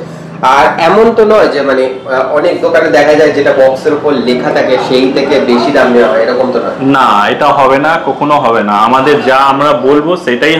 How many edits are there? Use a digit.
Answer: 0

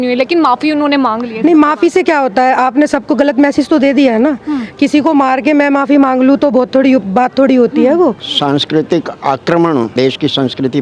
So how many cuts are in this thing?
2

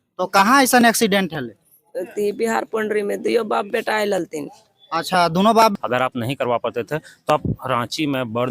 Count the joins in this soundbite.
1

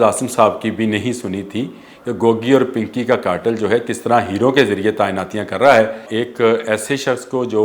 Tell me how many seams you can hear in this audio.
1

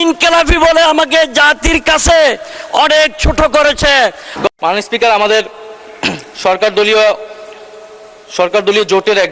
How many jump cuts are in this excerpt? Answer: 1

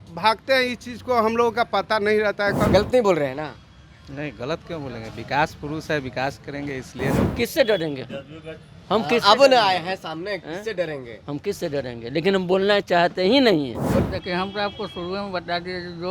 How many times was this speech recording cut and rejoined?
3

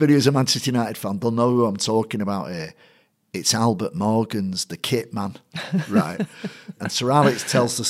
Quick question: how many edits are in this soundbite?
1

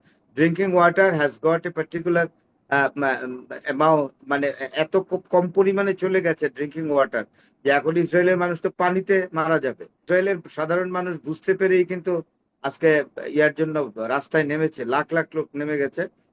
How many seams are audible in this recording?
1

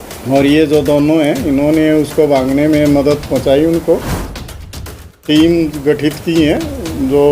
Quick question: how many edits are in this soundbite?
1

